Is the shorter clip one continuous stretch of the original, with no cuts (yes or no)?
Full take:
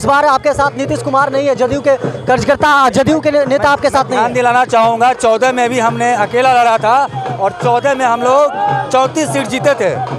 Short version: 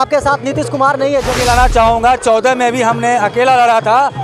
no